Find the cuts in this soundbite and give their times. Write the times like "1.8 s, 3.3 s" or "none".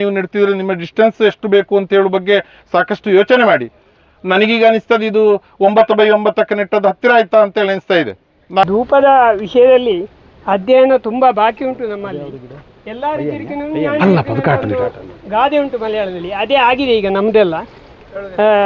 none

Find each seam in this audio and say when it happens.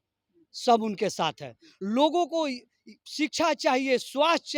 none

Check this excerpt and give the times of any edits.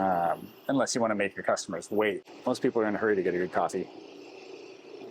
2.3 s

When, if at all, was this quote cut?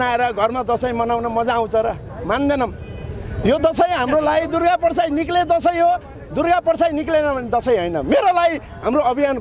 none

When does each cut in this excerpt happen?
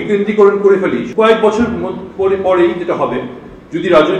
1.1 s

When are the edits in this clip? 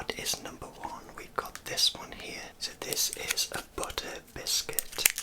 2.6 s

